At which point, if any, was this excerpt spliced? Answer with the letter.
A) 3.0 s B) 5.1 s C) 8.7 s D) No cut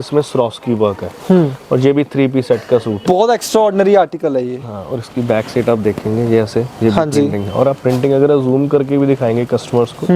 A